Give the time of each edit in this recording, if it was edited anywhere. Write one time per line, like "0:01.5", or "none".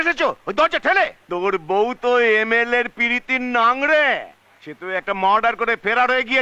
0:01.2